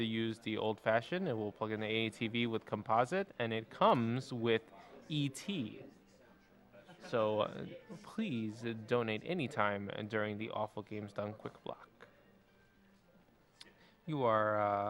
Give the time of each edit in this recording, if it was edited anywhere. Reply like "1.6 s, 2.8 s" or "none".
none

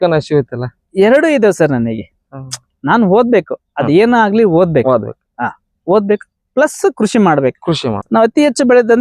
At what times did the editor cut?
7.9 s

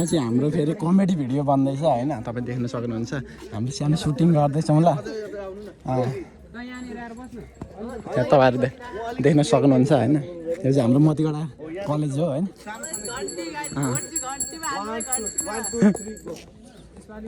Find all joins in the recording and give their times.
none

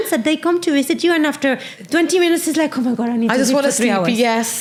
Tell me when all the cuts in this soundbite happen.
none

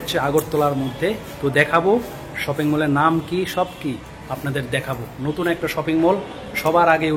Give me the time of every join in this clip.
none

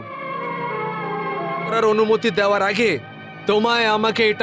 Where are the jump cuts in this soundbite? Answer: 1.7 s

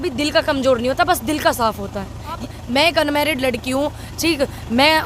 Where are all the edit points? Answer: 2.4 s

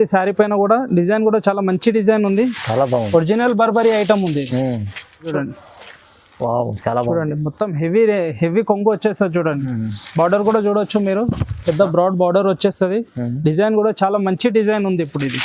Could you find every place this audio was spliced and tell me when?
5.3 s

